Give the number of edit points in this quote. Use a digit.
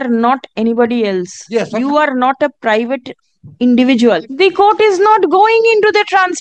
1